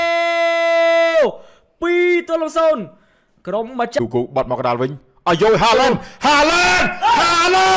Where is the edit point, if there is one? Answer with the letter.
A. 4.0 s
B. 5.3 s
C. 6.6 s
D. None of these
A